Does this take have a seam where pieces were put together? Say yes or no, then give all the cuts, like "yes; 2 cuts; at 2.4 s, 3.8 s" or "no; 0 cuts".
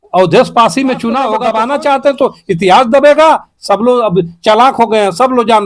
yes; 1 cut; at 1.4 s